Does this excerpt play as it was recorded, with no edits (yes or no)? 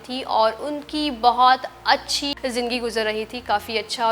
no